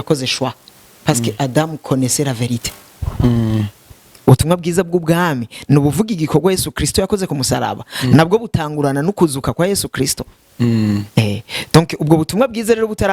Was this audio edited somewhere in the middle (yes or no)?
yes